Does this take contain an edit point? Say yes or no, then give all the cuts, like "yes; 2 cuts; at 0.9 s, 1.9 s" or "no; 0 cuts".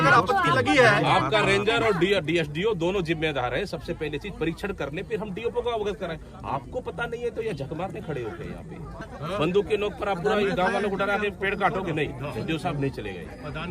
yes; 1 cut; at 9.0 s